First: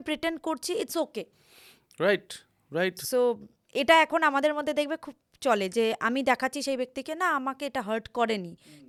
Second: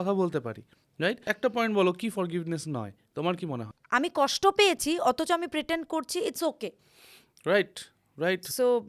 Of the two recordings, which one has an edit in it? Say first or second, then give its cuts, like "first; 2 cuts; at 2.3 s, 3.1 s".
second; 2 cuts; at 1.3 s, 3.7 s